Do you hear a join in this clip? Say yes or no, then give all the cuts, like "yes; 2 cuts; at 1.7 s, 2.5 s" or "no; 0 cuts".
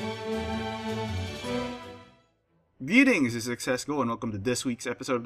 no; 0 cuts